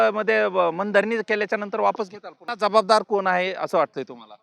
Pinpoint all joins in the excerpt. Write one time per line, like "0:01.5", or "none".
0:02.5